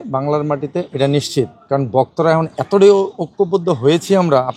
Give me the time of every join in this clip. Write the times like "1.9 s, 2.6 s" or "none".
none